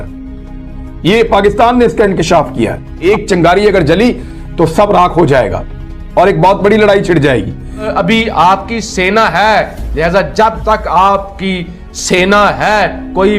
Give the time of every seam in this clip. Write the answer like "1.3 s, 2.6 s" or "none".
2.9 s, 7.9 s